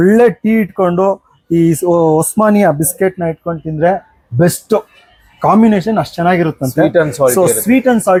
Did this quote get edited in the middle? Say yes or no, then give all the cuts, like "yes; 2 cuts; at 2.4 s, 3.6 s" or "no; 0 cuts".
no; 0 cuts